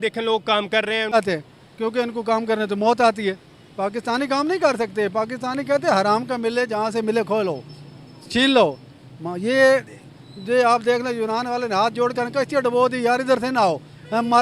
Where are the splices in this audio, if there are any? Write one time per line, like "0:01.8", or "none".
0:01.1